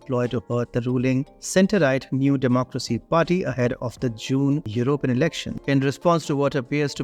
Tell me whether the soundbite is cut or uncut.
uncut